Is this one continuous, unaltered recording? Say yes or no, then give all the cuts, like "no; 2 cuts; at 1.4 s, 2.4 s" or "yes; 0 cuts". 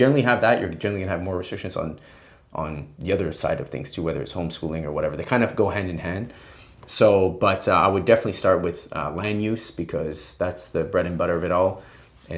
yes; 0 cuts